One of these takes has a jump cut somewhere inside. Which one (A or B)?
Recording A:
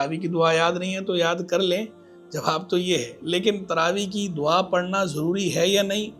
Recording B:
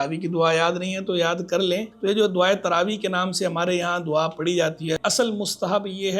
B